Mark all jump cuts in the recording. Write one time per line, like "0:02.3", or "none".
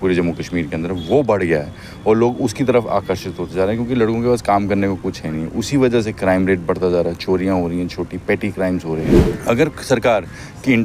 0:09.1